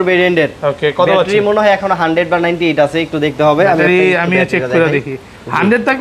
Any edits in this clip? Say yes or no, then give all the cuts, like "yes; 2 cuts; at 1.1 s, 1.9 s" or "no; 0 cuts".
no; 0 cuts